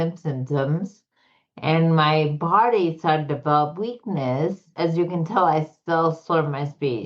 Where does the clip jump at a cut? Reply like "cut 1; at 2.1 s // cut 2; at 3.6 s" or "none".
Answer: cut 1; at 4.7 s